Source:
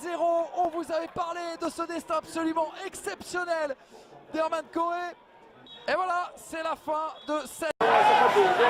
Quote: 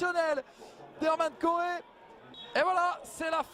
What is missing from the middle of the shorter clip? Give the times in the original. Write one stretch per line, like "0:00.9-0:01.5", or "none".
none